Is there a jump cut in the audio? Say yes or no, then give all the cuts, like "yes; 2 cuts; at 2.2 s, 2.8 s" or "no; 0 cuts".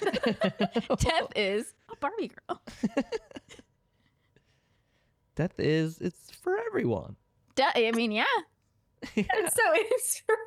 no; 0 cuts